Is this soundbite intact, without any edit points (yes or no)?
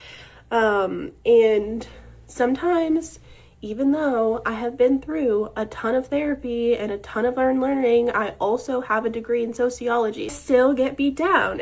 no